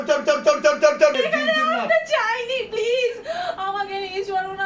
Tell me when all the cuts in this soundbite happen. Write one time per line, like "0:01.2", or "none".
0:01.1